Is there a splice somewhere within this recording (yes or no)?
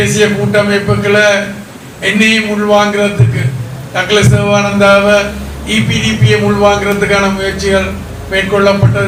no